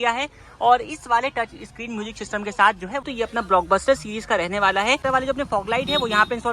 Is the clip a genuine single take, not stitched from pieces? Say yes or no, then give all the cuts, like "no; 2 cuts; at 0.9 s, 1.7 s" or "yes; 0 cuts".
no; 2 cuts; at 3.0 s, 5.0 s